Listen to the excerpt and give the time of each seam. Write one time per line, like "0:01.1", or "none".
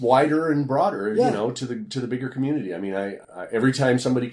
0:03.2

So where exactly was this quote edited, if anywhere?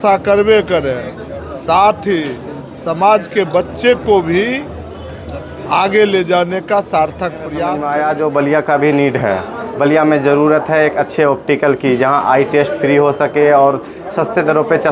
0:07.6

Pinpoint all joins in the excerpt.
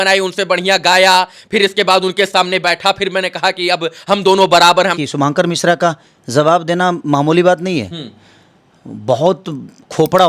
0:05.0

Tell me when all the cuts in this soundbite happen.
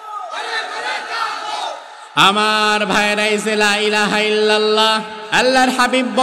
0:05.2

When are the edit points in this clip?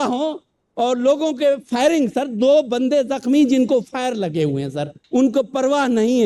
0:05.0

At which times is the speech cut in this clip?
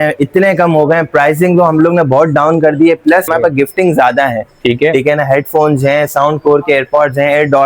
0:03.3

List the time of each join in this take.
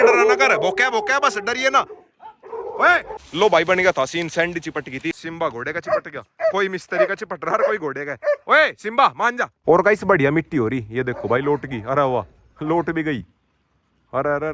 0:03.2
0:05.1
0:09.4

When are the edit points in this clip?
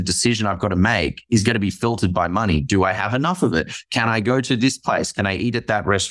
none

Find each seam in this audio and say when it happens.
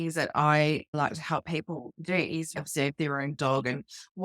0:00.9
0:02.6

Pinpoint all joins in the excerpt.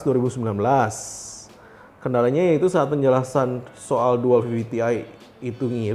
none

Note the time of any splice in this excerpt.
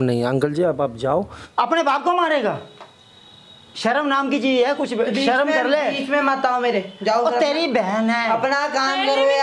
0:01.4

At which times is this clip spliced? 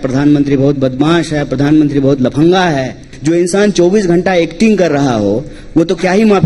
0:03.1

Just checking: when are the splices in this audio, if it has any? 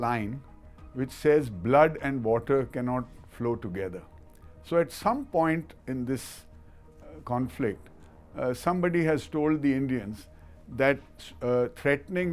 none

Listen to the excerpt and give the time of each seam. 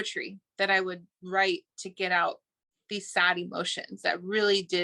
none

